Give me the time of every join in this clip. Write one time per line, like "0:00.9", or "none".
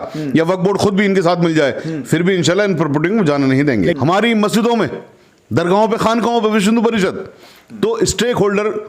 0:04.0